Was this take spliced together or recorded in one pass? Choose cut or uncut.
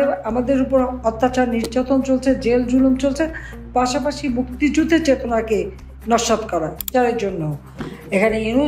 cut